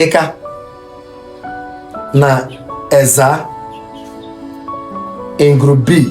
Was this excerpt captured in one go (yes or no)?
no